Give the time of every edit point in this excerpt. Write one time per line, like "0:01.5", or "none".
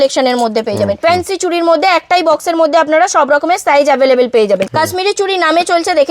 0:01.0
0:04.7

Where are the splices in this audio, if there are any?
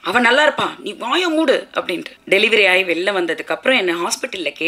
0:02.1

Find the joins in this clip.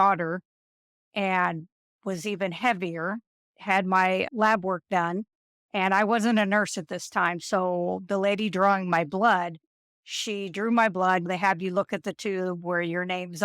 0:04.2
0:11.3

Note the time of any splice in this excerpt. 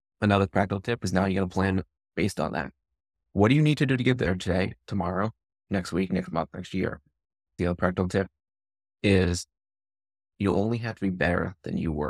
0:07.5
0:10.2

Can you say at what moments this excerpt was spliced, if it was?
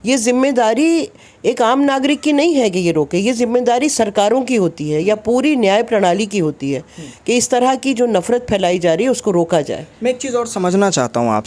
none

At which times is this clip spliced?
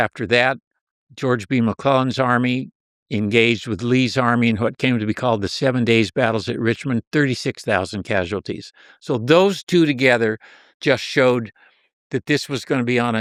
none

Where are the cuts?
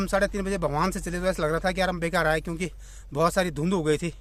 none

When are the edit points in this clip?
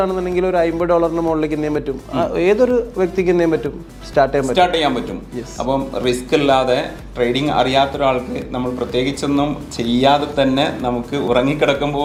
none

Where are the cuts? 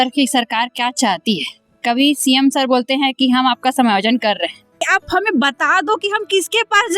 0:04.8

